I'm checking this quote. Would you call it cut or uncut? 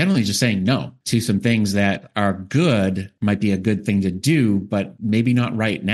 cut